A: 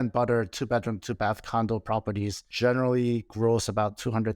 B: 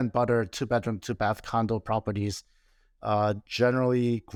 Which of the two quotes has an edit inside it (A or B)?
A